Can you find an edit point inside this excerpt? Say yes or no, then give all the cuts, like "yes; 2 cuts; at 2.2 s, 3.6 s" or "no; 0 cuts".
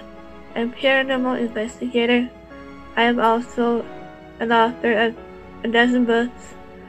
yes; 1 cut; at 3.5 s